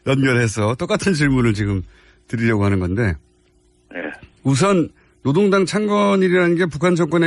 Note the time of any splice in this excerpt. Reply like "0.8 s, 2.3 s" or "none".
5.3 s